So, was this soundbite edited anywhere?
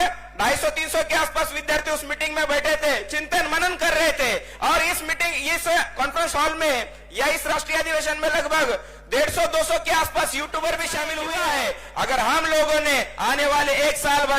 yes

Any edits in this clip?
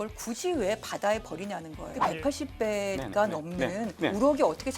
yes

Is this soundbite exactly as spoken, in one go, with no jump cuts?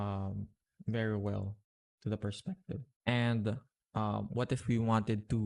yes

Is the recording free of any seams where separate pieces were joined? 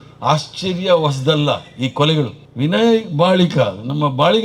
no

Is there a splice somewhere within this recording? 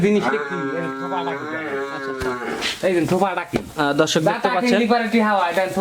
no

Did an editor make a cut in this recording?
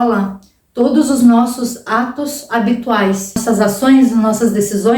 yes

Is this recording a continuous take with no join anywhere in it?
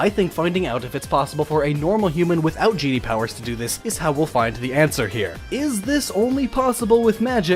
yes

